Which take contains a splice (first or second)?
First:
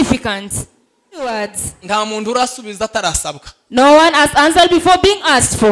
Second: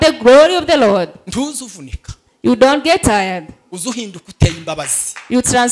first